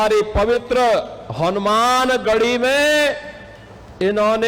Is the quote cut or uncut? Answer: uncut